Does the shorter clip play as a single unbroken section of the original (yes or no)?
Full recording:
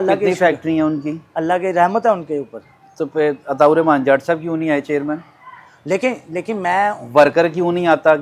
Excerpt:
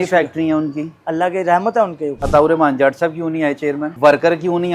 no